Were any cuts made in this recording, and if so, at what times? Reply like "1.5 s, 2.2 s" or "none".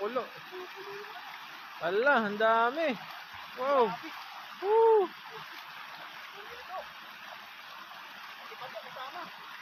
none